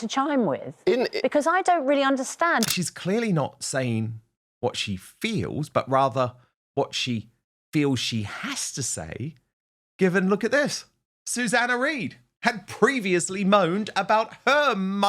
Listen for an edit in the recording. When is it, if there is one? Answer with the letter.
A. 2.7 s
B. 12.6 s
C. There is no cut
A